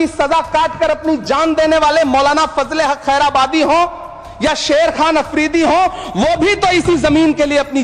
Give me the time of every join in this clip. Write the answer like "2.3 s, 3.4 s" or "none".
none